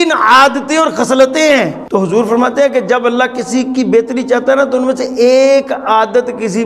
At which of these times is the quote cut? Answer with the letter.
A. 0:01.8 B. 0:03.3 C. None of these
A